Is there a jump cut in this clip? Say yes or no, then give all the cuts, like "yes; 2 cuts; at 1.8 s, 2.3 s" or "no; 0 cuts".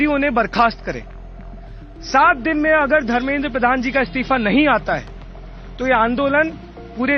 no; 0 cuts